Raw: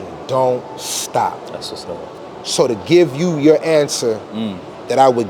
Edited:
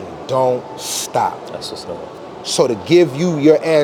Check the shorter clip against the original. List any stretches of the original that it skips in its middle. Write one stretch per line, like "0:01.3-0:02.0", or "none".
none